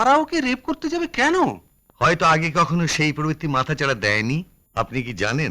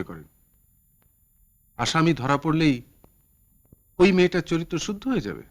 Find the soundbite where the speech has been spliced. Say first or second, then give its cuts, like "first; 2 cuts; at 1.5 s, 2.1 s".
first; 1 cut; at 4.6 s